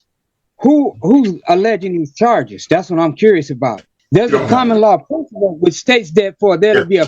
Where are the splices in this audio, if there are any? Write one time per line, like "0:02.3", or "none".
0:03.9